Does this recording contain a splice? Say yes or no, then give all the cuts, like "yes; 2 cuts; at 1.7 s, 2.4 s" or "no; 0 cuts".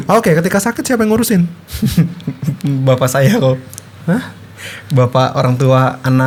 no; 0 cuts